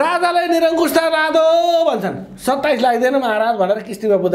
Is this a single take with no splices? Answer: yes; 0 cuts

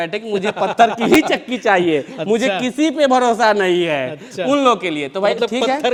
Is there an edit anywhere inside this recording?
no; 0 cuts

